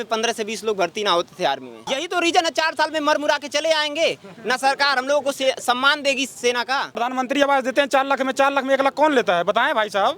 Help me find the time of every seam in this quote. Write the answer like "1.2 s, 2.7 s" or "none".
1.9 s, 7.0 s